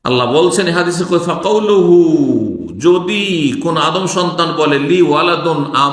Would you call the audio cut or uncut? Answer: uncut